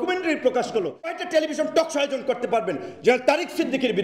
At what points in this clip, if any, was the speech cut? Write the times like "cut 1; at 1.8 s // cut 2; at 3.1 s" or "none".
cut 1; at 1.2 s